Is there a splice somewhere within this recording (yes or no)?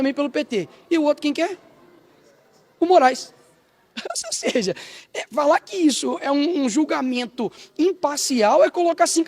no